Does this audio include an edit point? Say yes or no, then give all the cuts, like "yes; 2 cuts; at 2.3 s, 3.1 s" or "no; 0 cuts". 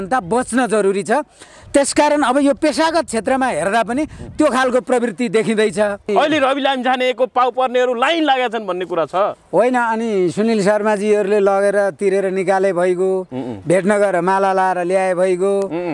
yes; 1 cut; at 6.1 s